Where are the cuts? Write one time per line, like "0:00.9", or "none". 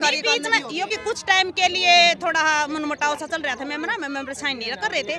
0:00.9